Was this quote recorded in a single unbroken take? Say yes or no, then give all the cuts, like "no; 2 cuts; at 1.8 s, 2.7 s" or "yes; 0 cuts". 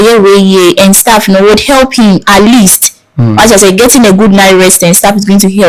yes; 0 cuts